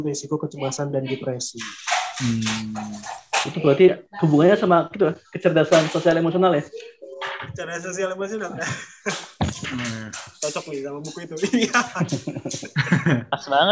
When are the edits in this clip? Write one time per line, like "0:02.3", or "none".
none